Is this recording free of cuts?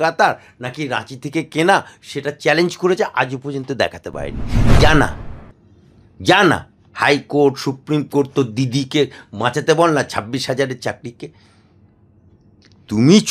no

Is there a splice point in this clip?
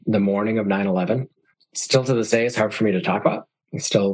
yes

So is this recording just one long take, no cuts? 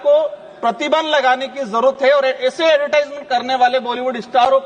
yes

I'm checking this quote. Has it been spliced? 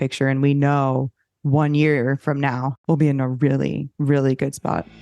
yes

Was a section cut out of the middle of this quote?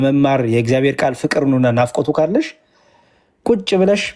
no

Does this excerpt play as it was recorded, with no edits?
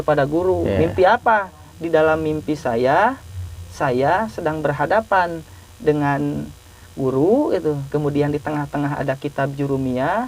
yes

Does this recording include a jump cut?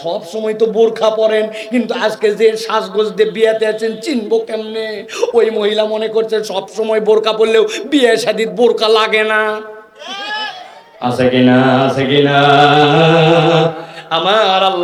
no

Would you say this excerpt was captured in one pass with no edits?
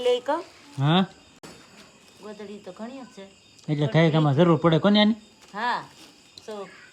yes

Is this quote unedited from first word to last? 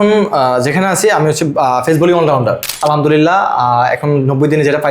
no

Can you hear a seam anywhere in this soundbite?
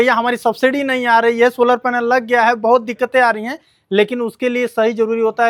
no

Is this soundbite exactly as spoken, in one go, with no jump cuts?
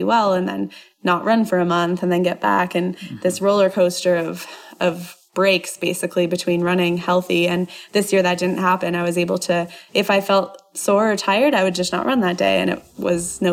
yes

